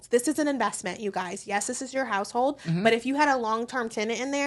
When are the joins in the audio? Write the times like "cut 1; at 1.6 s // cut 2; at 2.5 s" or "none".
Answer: none